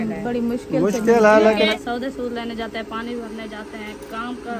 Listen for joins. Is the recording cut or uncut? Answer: cut